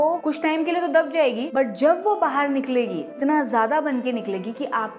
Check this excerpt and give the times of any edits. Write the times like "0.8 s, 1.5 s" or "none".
1.4 s, 3.1 s